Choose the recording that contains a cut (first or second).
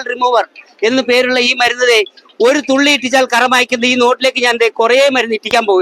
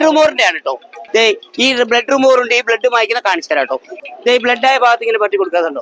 second